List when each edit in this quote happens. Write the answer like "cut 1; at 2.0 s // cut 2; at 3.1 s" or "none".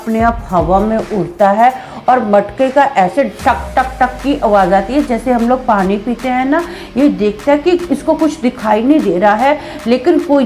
none